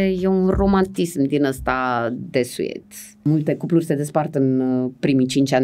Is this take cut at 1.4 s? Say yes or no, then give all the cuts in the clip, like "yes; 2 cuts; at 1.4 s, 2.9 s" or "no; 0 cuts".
no; 1 cut; at 3.3 s